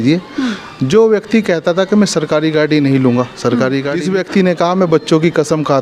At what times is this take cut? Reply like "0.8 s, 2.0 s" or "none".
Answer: 4.0 s